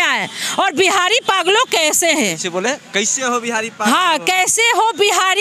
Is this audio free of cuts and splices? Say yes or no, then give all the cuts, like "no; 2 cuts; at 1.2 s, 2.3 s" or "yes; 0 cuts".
yes; 0 cuts